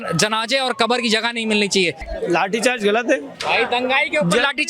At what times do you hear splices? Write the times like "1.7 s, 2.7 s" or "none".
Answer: 2.0 s, 3.3 s

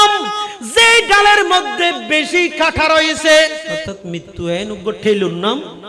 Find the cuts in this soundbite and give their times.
3.9 s

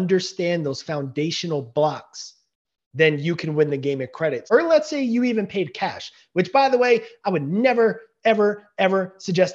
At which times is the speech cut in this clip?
4.4 s

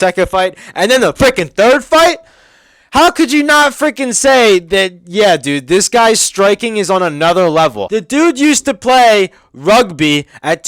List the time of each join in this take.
7.8 s

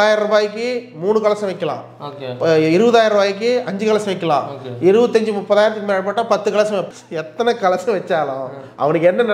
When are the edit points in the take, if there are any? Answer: 7.0 s

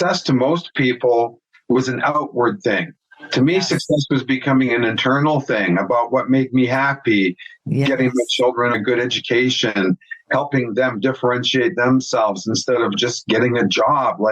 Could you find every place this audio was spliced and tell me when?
8.7 s, 12.9 s

